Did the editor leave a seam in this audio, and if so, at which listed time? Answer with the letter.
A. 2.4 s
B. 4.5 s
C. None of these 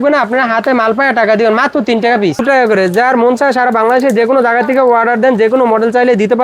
A